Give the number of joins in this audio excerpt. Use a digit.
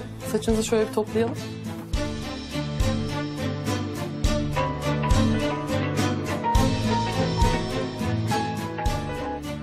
1